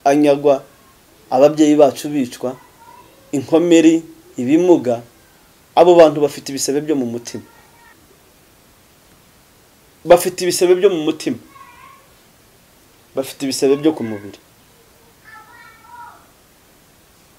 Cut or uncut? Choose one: cut